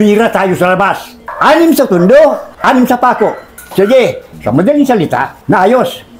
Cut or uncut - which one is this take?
uncut